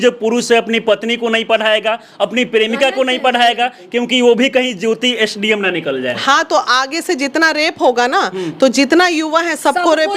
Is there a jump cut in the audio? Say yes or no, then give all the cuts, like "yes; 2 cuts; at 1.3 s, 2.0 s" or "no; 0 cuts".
no; 0 cuts